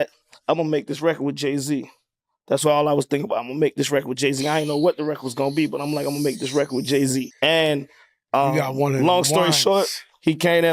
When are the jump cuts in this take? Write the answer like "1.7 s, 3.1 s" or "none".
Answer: 7.3 s